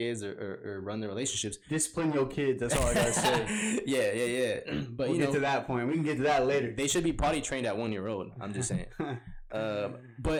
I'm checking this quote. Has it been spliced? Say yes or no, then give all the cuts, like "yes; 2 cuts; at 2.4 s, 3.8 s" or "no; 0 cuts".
no; 0 cuts